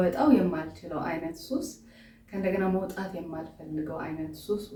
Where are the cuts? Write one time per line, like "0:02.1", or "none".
none